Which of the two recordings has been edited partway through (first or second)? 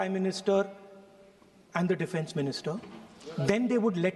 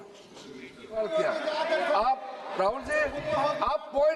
second